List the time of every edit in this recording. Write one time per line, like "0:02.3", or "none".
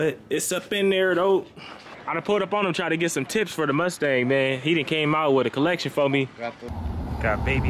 0:01.9
0:06.7